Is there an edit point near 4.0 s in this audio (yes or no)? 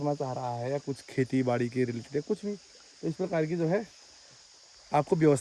no